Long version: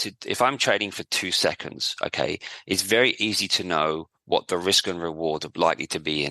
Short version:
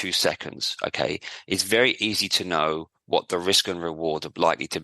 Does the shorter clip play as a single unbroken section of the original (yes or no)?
yes